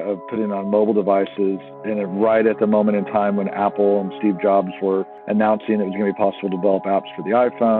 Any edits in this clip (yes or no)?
no